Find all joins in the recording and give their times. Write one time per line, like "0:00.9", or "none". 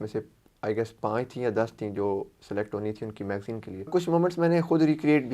0:03.9